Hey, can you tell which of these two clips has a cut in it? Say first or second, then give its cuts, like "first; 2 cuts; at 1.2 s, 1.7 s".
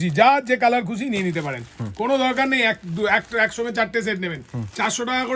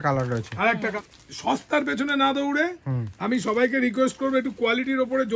second; 1 cut; at 0.9 s